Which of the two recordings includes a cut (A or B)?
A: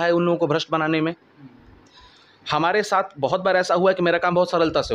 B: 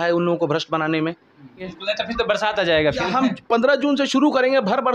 B